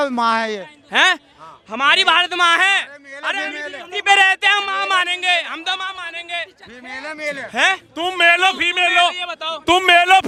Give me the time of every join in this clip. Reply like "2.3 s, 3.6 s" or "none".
none